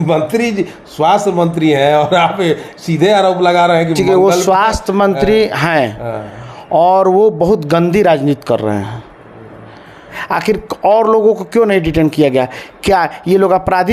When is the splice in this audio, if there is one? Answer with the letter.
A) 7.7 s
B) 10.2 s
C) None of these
B